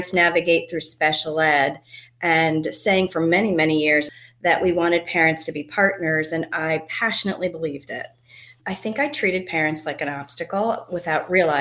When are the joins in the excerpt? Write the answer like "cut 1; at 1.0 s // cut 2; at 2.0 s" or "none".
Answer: cut 1; at 4.2 s // cut 2; at 8.5 s